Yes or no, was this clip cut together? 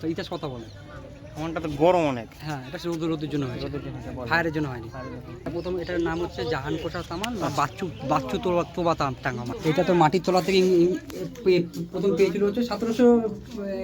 yes